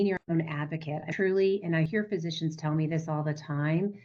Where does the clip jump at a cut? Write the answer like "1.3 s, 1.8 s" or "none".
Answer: none